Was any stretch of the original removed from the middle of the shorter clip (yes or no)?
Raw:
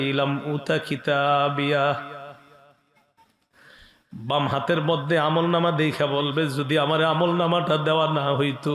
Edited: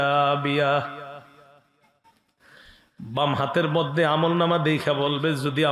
no